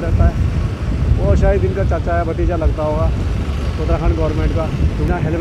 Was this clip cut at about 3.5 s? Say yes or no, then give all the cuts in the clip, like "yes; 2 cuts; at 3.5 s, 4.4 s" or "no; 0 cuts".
no; 0 cuts